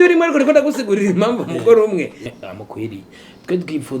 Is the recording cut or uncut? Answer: cut